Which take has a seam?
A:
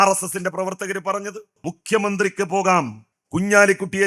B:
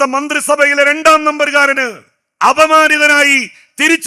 A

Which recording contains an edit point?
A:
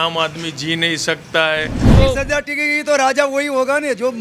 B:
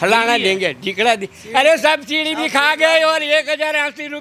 A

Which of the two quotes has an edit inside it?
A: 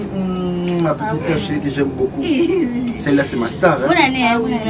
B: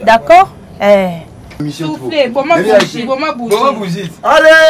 B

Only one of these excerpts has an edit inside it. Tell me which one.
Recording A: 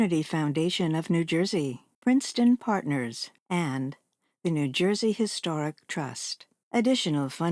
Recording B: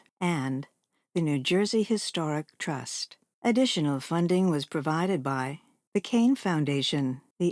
A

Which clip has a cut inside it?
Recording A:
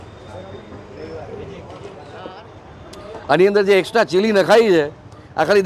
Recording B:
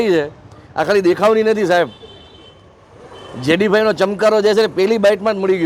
A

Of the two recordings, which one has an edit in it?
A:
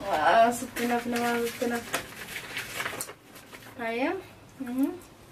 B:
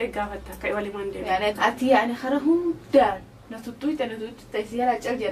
B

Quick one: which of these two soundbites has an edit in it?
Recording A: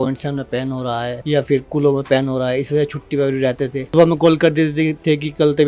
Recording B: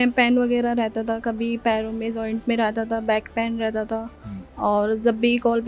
A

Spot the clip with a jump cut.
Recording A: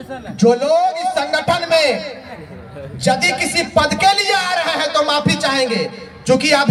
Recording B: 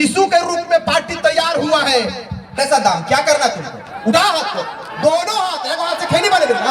B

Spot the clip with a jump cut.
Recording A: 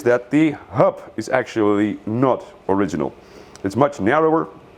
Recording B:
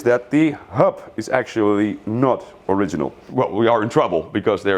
B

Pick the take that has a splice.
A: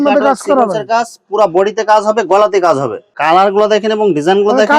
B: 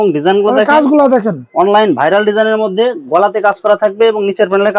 A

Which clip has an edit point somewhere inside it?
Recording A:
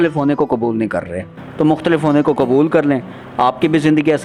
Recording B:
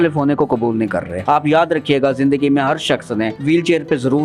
B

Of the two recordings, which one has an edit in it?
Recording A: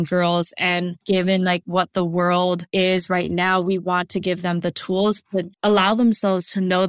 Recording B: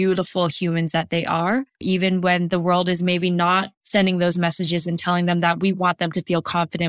A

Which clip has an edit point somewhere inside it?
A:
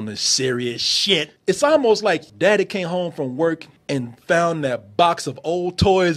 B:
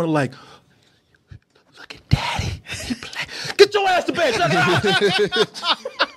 A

